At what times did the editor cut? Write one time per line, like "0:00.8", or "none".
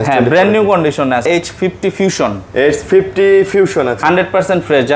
0:01.2